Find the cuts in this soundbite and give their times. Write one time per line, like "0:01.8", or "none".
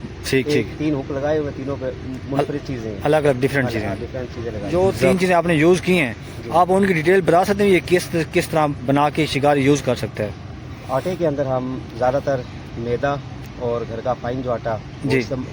0:04.6